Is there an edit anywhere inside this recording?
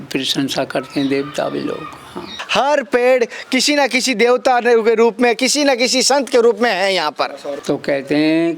yes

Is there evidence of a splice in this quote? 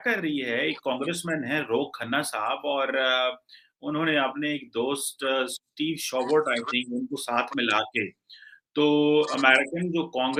no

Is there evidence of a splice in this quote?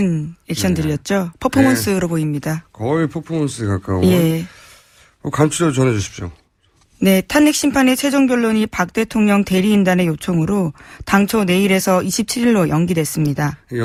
no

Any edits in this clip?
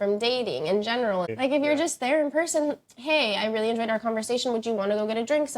yes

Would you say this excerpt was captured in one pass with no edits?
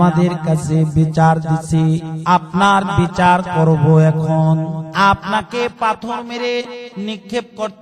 no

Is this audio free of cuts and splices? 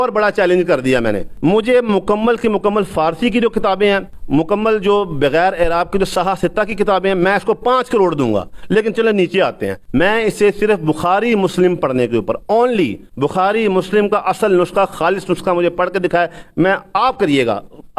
no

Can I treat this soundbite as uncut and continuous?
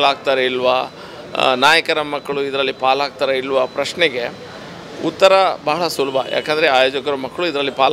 yes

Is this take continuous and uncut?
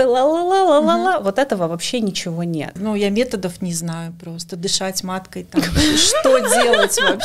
no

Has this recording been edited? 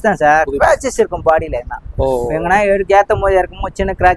no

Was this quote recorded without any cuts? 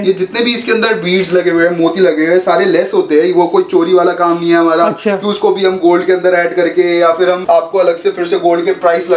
yes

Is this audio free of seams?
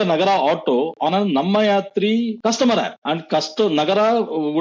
no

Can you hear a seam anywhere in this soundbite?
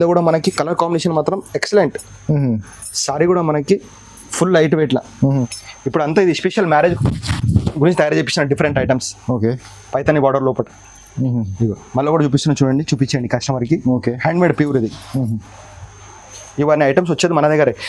yes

